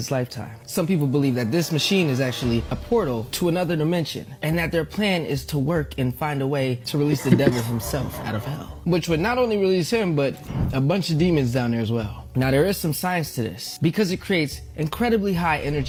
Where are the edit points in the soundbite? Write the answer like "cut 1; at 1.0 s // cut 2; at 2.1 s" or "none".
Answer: none